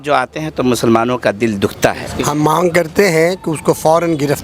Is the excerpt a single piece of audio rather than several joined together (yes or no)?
no